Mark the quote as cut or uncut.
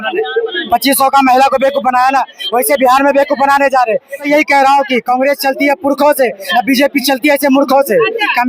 cut